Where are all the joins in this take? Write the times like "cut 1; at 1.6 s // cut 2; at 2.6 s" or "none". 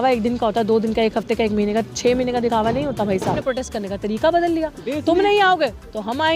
cut 1; at 3.4 s